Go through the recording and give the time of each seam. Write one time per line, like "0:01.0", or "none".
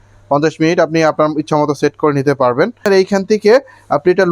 0:02.8